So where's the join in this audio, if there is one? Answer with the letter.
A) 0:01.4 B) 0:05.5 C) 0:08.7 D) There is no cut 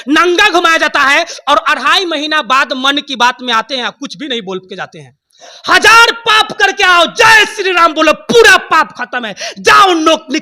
B